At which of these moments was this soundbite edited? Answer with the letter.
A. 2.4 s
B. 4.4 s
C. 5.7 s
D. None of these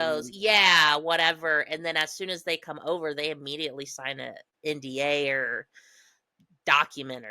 B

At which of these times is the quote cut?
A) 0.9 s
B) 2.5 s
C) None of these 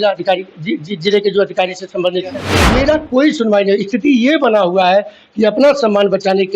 B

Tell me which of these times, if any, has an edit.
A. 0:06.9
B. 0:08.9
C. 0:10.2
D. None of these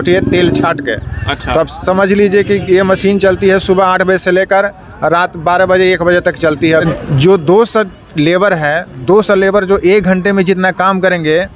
A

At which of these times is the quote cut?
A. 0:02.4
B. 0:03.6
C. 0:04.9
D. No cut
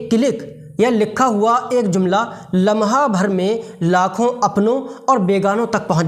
D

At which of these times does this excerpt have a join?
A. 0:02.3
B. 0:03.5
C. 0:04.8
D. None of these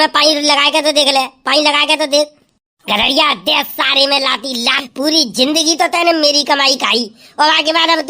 C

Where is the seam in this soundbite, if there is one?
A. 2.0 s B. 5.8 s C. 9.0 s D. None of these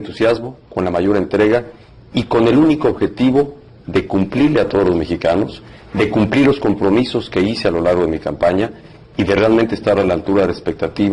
A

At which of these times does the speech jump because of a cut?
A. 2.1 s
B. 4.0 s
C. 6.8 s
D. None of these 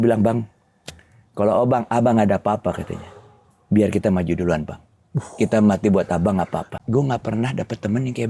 C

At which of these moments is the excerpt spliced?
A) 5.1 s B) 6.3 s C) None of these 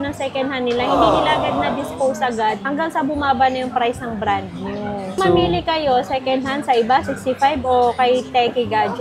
C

